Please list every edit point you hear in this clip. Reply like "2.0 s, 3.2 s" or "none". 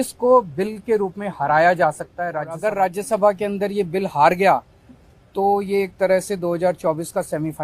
2.5 s

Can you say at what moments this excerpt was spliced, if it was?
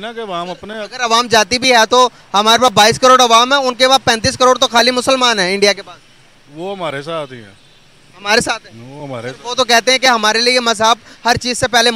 none

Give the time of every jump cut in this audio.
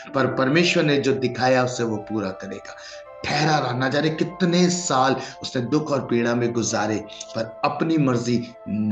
none

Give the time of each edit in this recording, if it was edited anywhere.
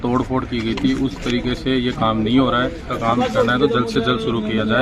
2.9 s

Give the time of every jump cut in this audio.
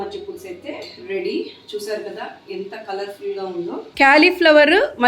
3.8 s

